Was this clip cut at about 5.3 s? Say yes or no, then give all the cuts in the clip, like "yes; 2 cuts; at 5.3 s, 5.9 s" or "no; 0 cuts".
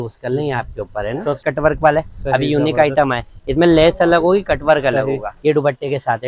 yes; 2 cuts; at 1.4 s, 5.3 s